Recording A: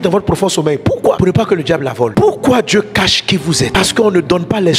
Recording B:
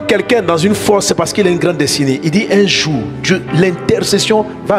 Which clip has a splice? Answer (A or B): A